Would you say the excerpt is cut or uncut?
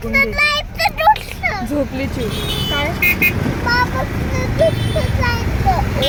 uncut